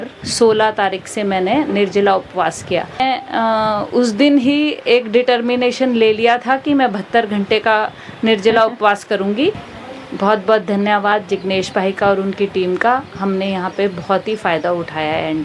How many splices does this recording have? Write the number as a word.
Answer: two